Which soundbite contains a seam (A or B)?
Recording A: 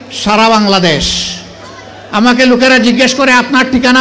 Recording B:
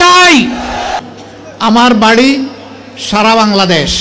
B